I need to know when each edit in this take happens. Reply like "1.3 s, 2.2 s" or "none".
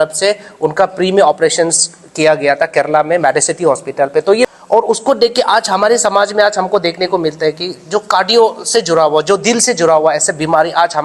4.5 s